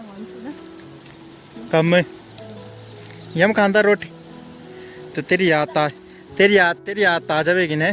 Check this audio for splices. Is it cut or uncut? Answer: uncut